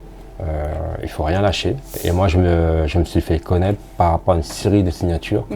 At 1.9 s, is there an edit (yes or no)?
yes